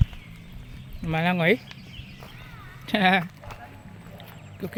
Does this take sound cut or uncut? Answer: uncut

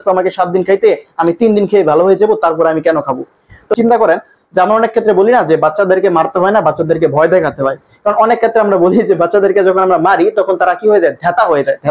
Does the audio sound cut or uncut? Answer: cut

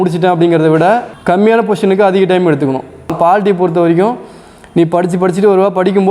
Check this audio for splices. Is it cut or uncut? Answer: cut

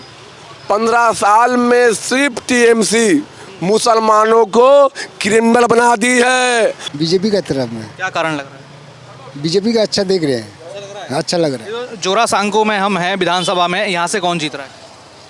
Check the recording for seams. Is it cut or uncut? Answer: cut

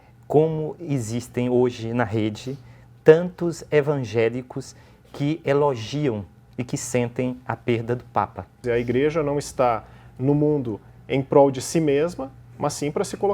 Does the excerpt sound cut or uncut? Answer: cut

